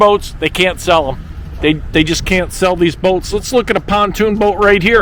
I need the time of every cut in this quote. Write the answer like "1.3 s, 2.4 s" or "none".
none